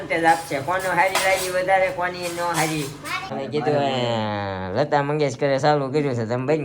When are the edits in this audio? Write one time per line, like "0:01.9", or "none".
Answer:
0:03.3

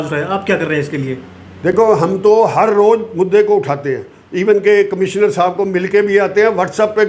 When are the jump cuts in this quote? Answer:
none

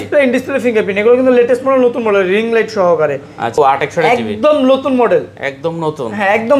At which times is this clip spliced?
0:03.6

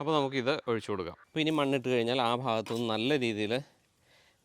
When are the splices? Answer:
0:01.2

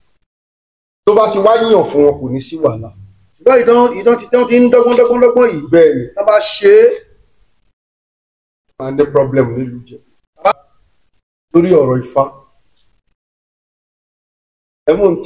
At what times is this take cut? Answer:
0:10.5

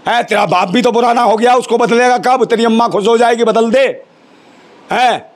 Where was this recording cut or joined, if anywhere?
none

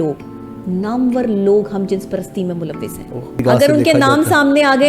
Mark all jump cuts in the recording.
0:03.4

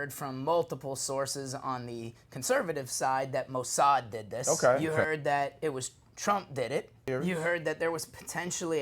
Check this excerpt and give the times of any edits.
0:04.4
0:07.1

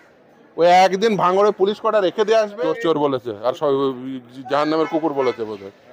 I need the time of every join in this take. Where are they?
0:02.5

